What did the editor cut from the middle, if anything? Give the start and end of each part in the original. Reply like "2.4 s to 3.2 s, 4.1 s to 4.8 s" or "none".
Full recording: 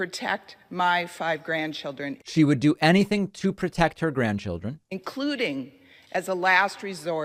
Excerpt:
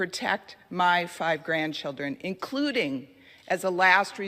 2.2 s to 4.8 s